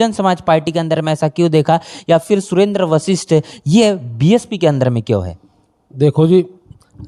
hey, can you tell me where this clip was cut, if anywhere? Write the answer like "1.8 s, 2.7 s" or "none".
none